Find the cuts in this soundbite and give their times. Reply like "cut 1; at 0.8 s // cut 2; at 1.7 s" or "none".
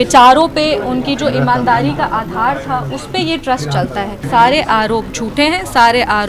cut 1; at 4.2 s